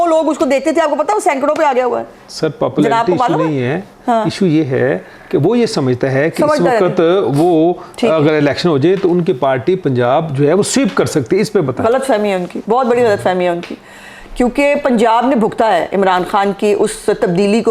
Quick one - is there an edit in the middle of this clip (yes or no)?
no